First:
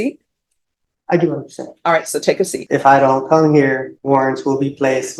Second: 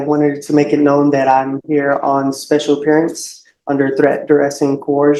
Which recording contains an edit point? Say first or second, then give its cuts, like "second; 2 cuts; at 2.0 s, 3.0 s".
first; 2 cuts; at 2.5 s, 3.9 s